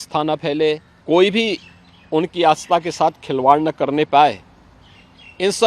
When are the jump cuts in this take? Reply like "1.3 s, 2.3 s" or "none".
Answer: 0.9 s